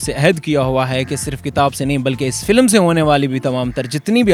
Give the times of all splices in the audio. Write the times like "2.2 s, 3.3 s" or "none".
none